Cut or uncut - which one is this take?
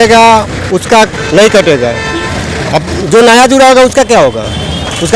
uncut